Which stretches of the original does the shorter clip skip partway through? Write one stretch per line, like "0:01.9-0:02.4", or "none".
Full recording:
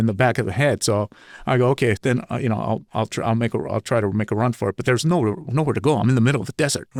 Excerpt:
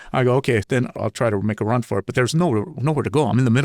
0:02.3-0:03.6